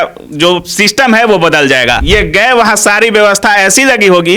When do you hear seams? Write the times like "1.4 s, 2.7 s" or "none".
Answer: 2.0 s